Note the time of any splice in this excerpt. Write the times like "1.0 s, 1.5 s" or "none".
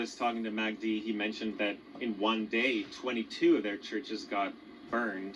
none